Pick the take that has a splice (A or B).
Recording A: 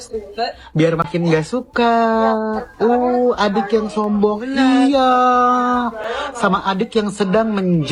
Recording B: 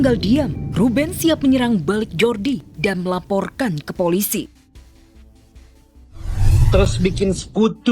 B